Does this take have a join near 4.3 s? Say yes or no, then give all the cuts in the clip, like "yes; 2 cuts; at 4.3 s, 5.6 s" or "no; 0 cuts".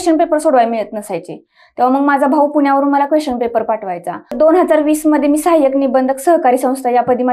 yes; 1 cut; at 4.3 s